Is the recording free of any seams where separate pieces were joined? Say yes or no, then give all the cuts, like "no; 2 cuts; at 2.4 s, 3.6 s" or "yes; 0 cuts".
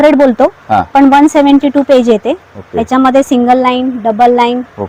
yes; 0 cuts